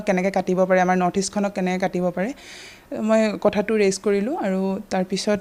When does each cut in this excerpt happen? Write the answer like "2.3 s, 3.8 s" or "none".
none